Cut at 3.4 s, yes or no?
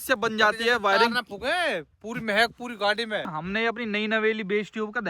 yes